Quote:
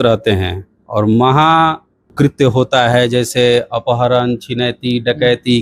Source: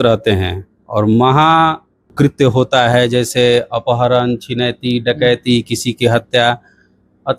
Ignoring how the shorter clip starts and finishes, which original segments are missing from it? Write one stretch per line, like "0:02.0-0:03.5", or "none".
none